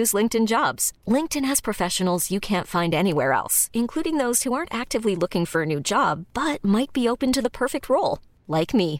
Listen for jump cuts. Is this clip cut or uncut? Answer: uncut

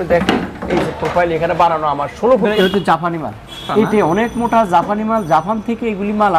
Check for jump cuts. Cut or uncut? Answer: cut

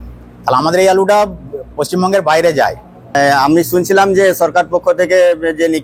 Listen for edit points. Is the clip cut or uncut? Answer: cut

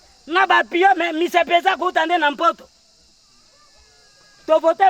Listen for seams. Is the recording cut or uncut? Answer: uncut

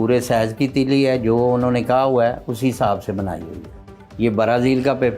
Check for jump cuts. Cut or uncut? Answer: cut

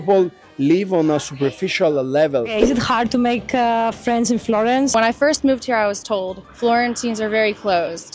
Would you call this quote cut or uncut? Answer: uncut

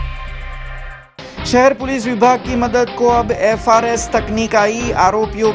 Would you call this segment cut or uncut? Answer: cut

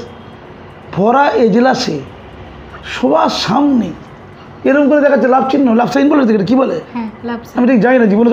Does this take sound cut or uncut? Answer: uncut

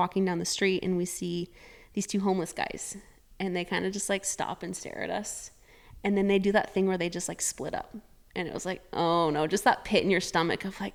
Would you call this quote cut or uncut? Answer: uncut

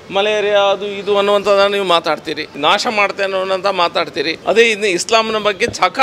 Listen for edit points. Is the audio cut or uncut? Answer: cut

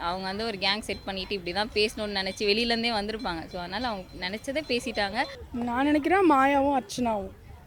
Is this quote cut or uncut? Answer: cut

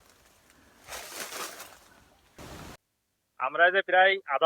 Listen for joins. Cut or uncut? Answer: cut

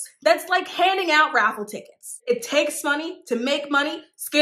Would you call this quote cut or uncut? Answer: cut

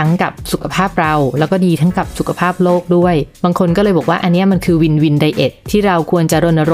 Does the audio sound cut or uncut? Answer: uncut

